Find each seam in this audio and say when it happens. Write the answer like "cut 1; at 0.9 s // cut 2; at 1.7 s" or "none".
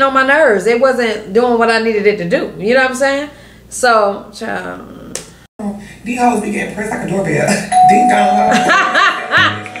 cut 1; at 5.6 s